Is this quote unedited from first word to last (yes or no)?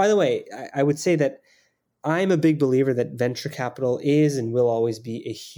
yes